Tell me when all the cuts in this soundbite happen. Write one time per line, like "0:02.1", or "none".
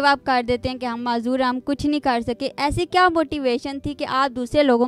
none